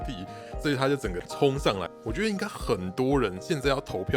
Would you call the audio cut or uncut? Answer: cut